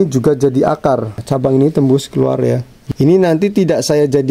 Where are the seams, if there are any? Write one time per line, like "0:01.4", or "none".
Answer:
0:01.2
0:02.8